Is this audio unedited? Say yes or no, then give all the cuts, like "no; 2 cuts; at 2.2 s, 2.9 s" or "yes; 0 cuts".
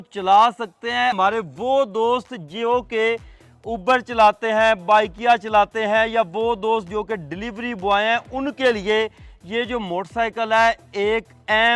no; 1 cut; at 1.1 s